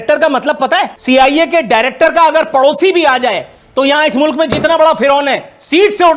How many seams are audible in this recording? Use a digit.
1